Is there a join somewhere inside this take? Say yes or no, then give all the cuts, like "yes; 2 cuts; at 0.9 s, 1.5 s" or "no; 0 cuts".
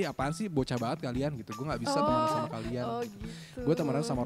no; 0 cuts